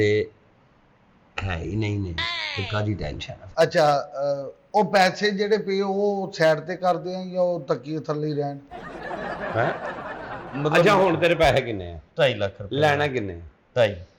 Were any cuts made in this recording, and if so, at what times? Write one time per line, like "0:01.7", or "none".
0:03.4
0:10.3